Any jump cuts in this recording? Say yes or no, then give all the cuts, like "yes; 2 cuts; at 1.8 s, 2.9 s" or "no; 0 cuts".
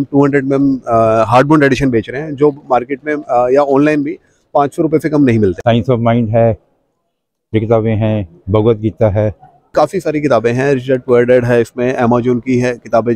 yes; 2 cuts; at 5.6 s, 9.7 s